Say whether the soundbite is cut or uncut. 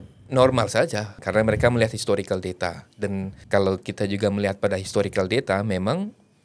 cut